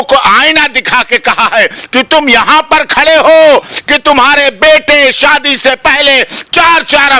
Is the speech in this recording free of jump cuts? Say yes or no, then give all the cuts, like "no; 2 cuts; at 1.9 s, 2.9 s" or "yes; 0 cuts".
yes; 0 cuts